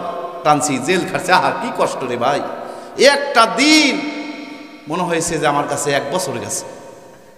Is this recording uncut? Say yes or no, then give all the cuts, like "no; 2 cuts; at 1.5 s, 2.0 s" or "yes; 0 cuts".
yes; 0 cuts